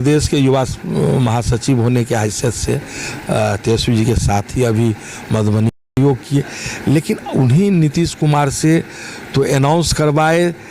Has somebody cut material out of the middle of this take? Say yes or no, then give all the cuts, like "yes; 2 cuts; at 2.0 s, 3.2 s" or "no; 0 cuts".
yes; 1 cut; at 6.0 s